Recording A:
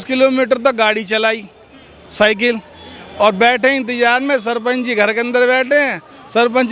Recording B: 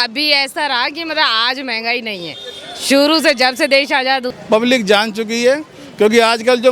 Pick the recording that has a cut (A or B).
B